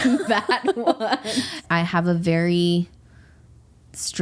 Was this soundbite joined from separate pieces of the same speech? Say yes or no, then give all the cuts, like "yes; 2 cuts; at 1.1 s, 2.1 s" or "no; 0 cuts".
yes; 1 cut; at 1.6 s